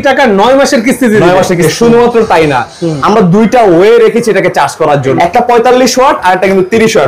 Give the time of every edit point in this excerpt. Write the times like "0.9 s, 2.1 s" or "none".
1.7 s, 5.2 s

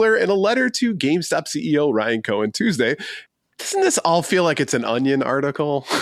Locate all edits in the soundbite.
3.2 s

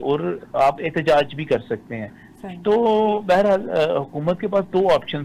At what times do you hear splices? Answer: none

